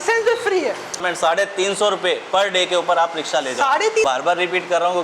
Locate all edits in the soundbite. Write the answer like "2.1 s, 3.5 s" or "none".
1.0 s, 4.0 s

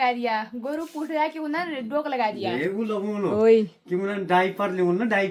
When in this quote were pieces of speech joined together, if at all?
none

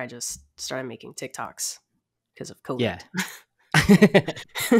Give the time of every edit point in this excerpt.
none

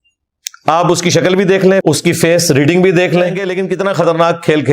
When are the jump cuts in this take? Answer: 3.6 s

